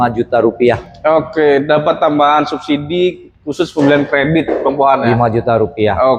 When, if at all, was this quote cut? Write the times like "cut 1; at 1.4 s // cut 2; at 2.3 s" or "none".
none